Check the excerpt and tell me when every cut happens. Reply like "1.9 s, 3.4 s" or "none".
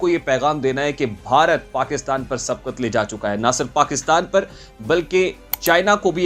none